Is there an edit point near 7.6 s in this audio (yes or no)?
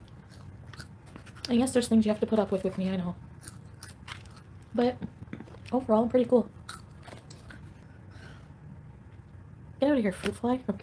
yes